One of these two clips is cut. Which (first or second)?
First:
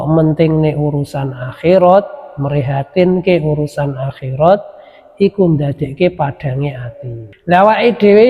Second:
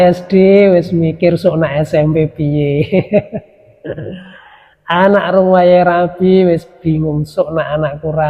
first